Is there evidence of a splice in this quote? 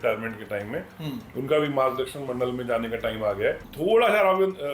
yes; 1 cut; at 3.7 s

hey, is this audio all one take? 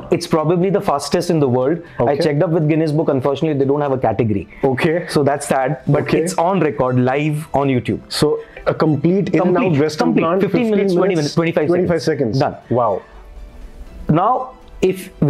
yes; 0 cuts

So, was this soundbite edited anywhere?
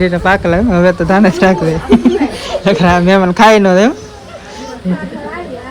no; 0 cuts

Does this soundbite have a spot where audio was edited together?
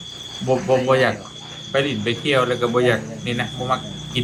no; 0 cuts

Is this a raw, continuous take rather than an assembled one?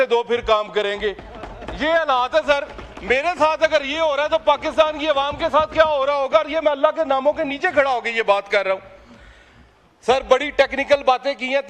yes; 0 cuts

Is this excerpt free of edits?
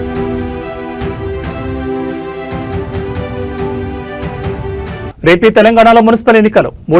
no; 2 cuts; at 3.9 s, 5.0 s

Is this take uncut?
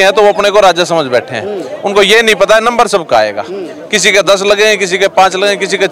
yes; 0 cuts

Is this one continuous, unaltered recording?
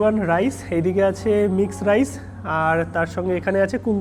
yes; 0 cuts

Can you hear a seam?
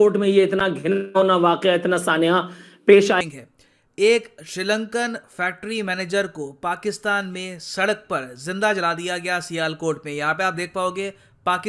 yes; 1 cut; at 3.2 s

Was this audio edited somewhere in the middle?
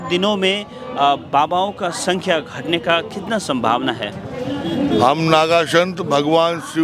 yes; 1 cut; at 4.4 s

